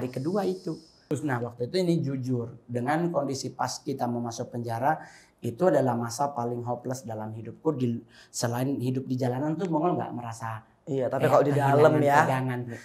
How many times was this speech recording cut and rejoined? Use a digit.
1